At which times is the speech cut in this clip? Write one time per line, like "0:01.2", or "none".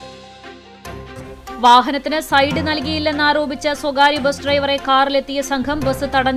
0:01.2